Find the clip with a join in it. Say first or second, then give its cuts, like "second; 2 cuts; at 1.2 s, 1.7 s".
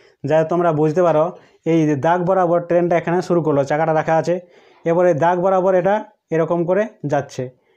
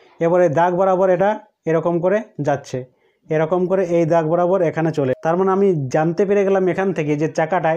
second; 1 cut; at 5.2 s